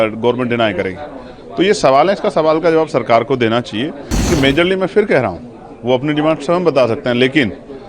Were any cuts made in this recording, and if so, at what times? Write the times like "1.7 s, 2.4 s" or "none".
4.1 s